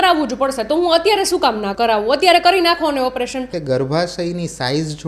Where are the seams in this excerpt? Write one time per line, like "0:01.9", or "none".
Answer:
0:01.7
0:03.5